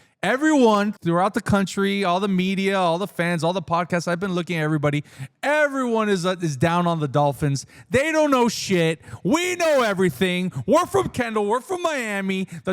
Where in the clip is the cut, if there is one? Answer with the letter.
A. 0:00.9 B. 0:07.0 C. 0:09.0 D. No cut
A